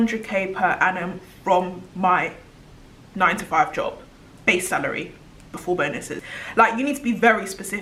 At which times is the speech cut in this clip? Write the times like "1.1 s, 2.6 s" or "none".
none